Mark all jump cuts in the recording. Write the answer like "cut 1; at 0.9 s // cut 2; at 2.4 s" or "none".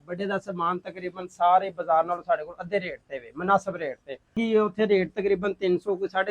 cut 1; at 4.4 s